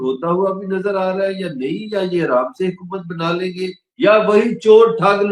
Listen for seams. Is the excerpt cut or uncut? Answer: uncut